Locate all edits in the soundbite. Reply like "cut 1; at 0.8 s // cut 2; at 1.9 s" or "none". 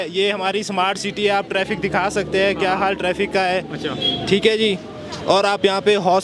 none